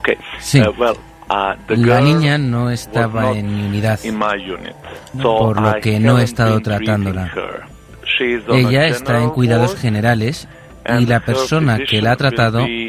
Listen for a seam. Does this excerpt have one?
no; 0 cuts

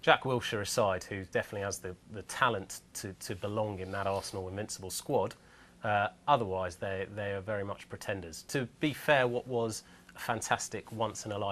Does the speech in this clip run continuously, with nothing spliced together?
no; 1 cut; at 6.6 s

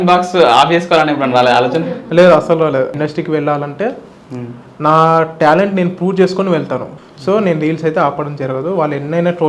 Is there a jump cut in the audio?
yes; 2 cuts; at 2.9 s, 6.9 s

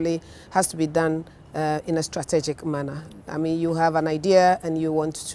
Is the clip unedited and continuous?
yes; 0 cuts

